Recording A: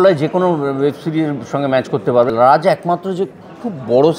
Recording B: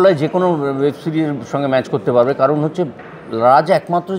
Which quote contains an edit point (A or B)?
A